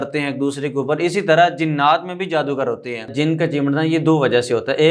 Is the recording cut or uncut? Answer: cut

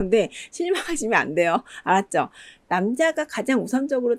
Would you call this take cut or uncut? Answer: uncut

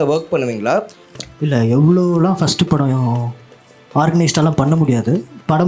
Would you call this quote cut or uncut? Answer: cut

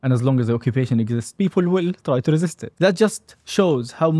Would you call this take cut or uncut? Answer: cut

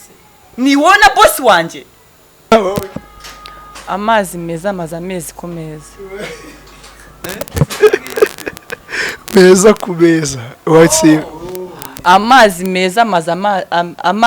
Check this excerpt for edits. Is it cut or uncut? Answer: cut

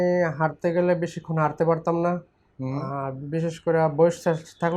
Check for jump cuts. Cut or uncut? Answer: uncut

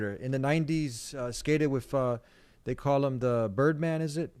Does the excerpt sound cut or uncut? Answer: uncut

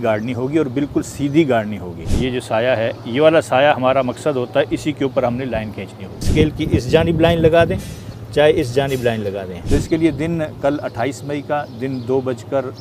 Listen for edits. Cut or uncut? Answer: cut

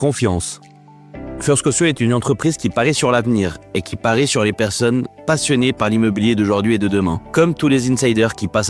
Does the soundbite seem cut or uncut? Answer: cut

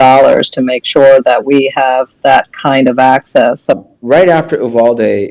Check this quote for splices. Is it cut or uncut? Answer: cut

